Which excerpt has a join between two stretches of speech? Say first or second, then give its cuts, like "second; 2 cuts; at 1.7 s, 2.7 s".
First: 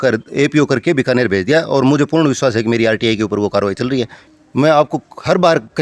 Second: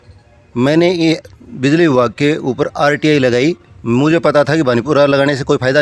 first; 1 cut; at 4.2 s